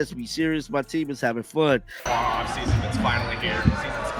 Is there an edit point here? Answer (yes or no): yes